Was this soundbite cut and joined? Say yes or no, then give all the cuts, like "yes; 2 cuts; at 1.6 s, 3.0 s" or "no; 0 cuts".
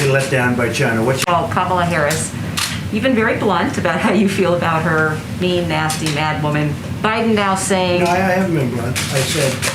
yes; 1 cut; at 1.2 s